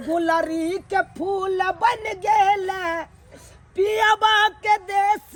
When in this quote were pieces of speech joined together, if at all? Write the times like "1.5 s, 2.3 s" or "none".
none